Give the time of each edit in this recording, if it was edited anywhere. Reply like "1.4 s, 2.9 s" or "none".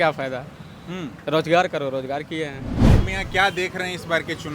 3.0 s